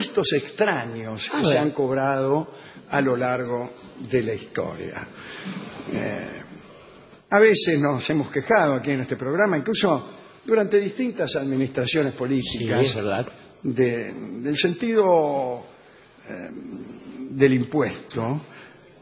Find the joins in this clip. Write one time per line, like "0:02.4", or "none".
none